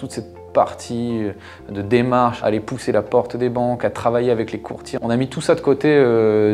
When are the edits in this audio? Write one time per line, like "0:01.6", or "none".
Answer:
0:02.4
0:04.8